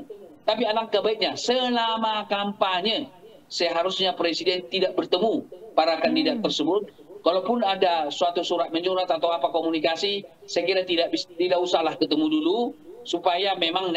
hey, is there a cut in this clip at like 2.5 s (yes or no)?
no